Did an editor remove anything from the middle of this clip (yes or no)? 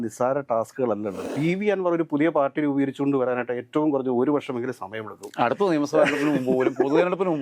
yes